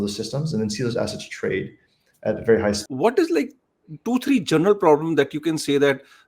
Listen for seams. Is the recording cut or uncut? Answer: cut